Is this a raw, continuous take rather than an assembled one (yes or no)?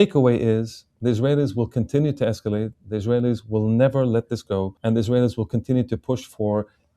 no